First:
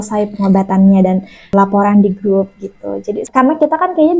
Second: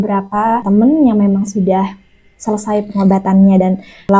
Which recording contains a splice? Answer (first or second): first